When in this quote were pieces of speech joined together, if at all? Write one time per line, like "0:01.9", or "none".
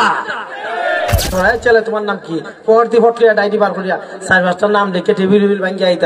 0:01.3